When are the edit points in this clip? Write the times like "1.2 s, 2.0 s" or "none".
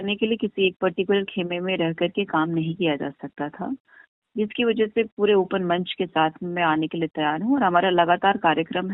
none

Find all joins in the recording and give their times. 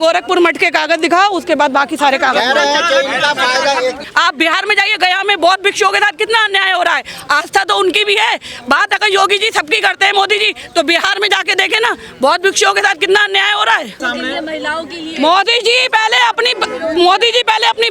4.0 s, 14.0 s

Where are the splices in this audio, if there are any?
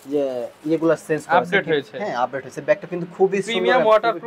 none

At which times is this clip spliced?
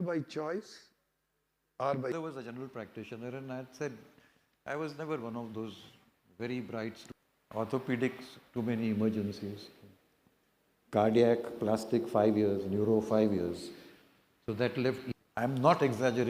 2.1 s, 7.0 s, 15.1 s

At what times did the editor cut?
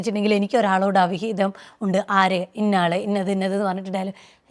none

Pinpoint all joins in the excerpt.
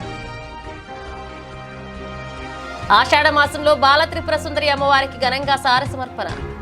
1.6 s

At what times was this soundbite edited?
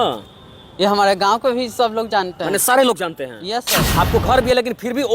3.8 s

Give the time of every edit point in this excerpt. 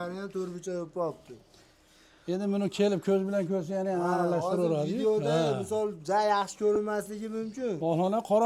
none

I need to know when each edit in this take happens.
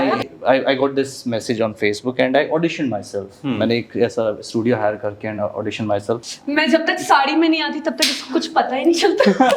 6.3 s

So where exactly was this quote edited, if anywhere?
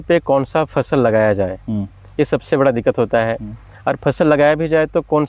none

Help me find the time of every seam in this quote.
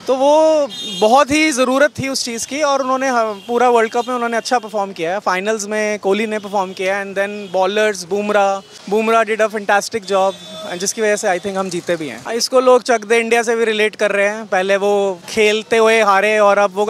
8.7 s, 12.2 s, 15.2 s

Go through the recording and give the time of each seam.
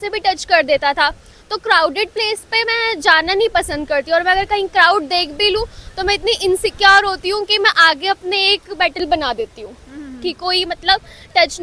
none

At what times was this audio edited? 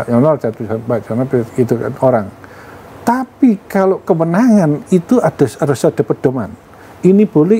none

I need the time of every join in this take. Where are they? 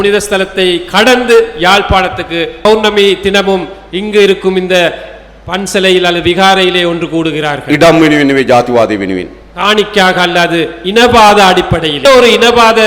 2.6 s, 11.9 s

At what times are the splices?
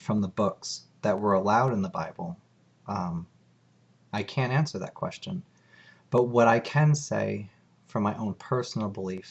1.4 s

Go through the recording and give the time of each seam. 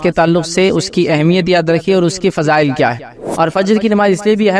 3.2 s

